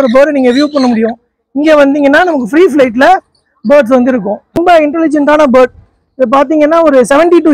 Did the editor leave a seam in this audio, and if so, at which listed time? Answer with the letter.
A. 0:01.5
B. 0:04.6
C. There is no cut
B